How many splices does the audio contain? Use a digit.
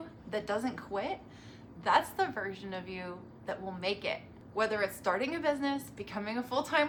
0